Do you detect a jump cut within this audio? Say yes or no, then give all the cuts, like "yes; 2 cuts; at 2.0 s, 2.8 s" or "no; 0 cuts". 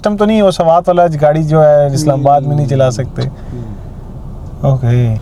no; 0 cuts